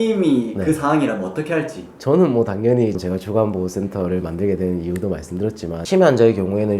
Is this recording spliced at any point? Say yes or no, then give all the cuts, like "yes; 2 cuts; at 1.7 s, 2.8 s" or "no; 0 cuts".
yes; 2 cuts; at 3.0 s, 5.8 s